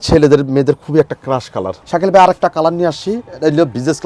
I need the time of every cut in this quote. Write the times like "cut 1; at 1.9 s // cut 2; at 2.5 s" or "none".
cut 1; at 1.8 s